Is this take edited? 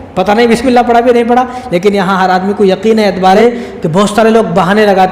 yes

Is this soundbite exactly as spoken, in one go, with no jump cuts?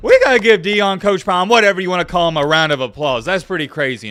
yes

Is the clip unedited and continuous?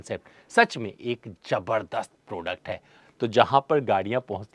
no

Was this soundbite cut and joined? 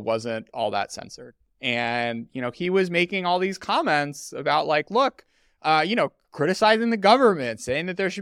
no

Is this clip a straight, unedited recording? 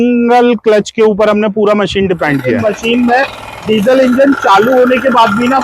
no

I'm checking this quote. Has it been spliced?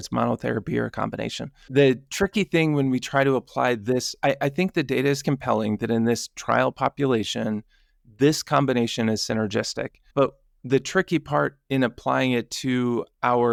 no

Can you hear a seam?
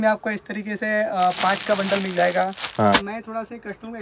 yes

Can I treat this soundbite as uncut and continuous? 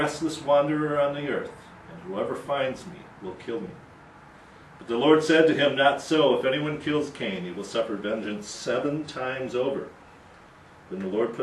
yes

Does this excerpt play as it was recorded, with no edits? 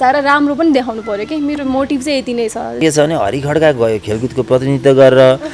no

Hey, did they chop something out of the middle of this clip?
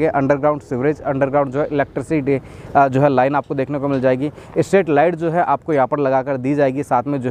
no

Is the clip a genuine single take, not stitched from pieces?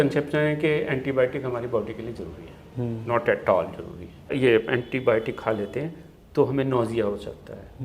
no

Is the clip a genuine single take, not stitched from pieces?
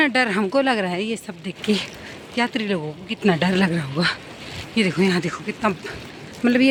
yes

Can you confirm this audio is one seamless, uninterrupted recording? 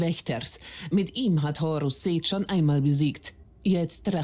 yes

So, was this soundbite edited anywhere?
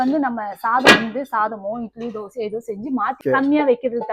yes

